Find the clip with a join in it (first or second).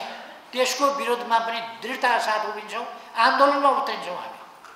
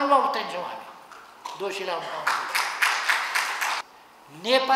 second